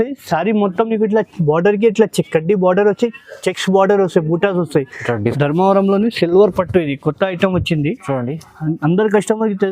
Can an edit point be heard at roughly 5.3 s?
yes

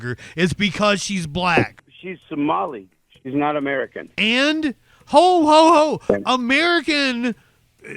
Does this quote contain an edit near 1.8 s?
yes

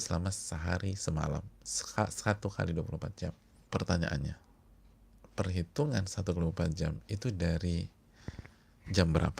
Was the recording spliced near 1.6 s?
no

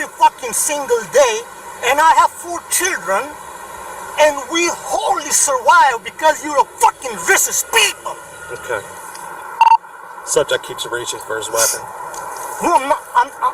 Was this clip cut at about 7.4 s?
no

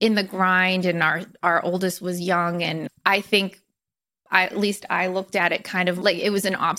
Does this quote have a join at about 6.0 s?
yes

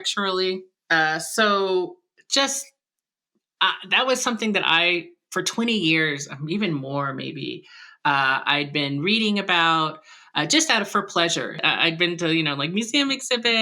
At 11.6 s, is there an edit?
yes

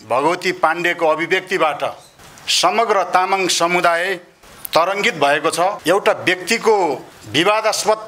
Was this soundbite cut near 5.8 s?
yes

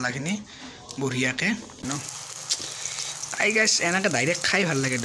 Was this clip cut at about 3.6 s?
no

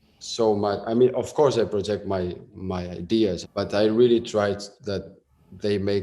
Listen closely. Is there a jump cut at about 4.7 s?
no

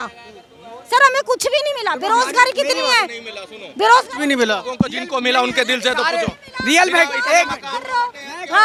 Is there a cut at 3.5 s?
no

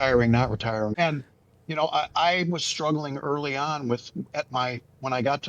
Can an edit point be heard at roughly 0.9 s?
yes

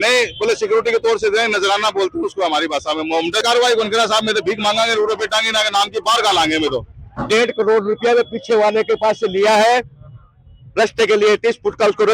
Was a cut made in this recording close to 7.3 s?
yes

